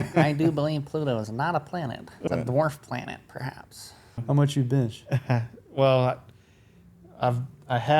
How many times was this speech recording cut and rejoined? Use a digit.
2